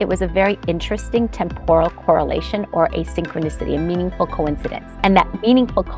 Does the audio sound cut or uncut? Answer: cut